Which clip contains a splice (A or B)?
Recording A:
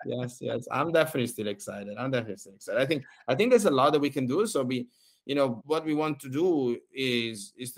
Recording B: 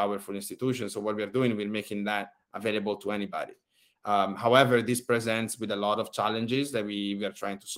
A